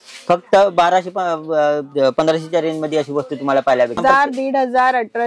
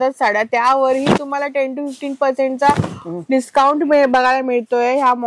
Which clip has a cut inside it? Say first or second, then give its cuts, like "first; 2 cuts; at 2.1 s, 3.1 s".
first; 1 cut; at 4.0 s